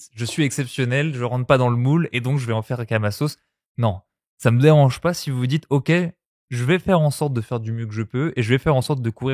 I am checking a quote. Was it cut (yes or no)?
no